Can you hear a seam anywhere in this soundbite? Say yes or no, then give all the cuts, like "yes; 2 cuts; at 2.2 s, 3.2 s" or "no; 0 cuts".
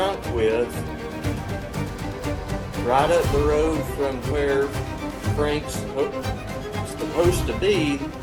no; 0 cuts